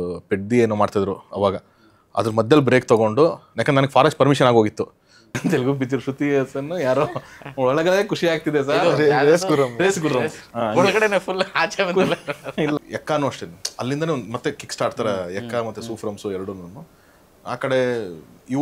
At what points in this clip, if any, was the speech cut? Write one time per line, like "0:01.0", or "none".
0:05.4
0:12.8